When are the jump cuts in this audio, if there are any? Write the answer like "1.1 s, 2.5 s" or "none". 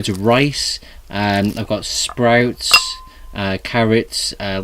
1.7 s